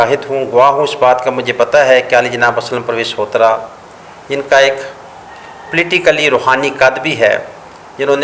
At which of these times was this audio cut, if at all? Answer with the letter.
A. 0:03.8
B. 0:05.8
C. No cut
C